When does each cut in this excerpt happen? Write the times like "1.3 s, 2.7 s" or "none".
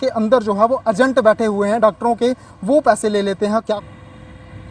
3.7 s